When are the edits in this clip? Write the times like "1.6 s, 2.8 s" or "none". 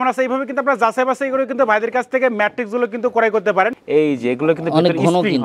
3.7 s